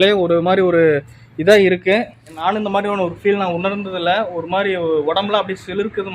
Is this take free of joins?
no; 1 cut; at 2.3 s

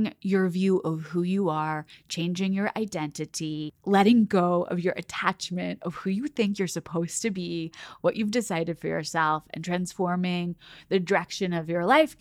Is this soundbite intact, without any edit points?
yes; 0 cuts

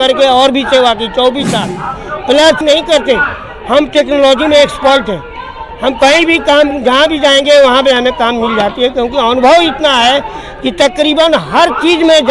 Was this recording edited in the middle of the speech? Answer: yes; 1 cut; at 2.6 s

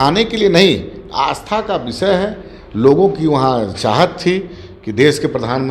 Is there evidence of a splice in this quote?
no; 0 cuts

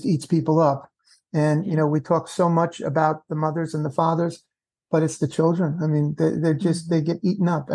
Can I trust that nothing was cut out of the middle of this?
yes; 0 cuts

